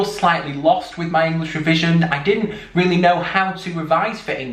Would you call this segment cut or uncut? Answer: uncut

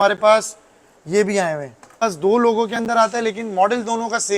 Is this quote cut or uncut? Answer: cut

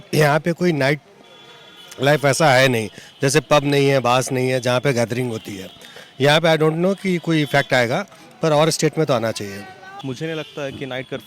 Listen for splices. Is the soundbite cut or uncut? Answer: cut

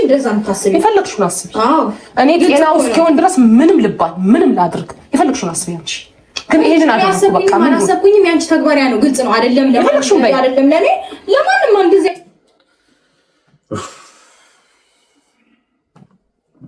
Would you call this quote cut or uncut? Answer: uncut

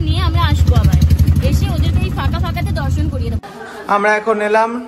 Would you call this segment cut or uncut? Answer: cut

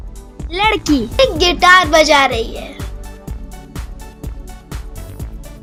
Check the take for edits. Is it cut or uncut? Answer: uncut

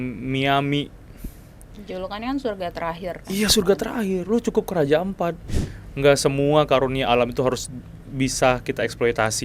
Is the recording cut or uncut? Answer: cut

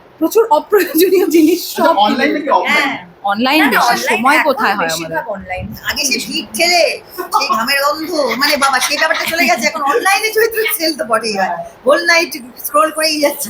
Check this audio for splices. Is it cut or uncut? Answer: uncut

